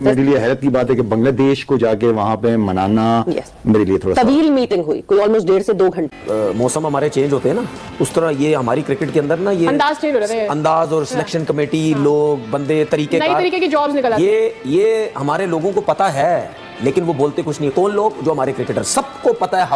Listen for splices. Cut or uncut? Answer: cut